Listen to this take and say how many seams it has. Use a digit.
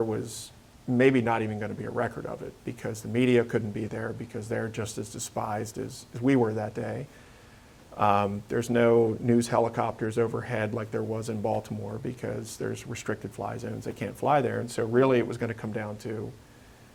0